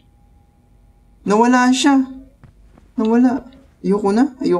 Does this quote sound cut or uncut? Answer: uncut